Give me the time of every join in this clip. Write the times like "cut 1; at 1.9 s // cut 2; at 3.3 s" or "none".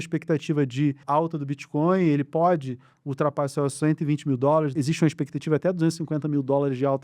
cut 1; at 1.0 s // cut 2; at 4.7 s

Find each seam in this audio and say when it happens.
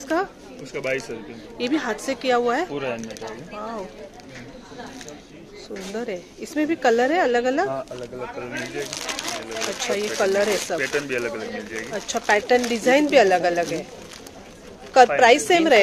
none

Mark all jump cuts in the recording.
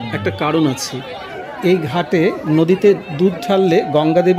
cut 1; at 1.2 s

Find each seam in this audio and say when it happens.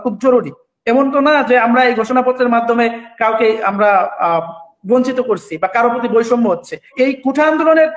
cut 1; at 6.8 s

